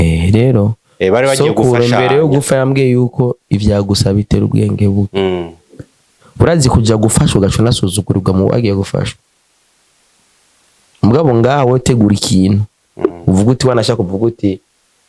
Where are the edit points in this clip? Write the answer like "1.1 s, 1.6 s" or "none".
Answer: none